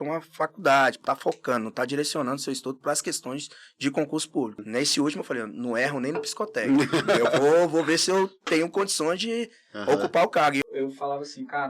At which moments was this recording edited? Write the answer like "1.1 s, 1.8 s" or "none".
1.0 s, 4.6 s, 10.6 s